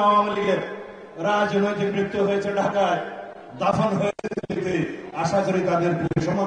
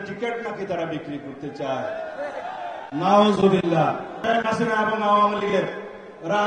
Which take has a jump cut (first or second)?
second